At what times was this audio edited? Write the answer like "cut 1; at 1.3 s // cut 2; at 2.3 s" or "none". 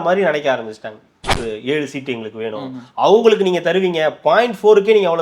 cut 1; at 1.4 s